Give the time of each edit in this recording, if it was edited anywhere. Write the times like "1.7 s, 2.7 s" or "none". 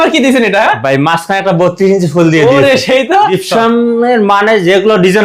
3.2 s